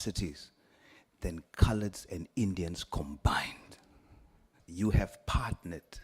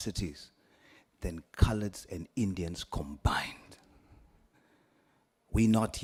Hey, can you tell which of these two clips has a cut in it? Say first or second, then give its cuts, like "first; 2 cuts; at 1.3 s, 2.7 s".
first; 1 cut; at 4.5 s